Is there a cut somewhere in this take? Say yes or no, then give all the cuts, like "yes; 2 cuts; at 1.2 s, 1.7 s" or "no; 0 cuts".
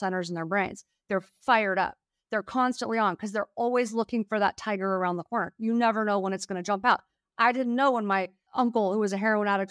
yes; 1 cut; at 8.4 s